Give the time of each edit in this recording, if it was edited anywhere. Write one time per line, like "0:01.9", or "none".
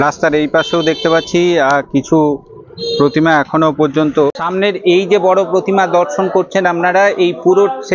0:04.4